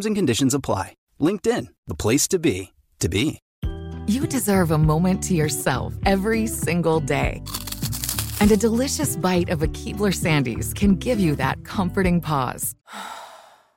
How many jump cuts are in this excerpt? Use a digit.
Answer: 1